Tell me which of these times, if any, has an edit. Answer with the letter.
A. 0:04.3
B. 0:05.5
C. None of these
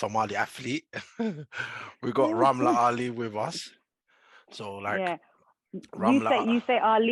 C